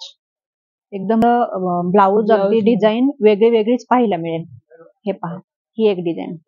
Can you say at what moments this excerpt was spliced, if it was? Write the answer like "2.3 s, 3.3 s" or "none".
1.2 s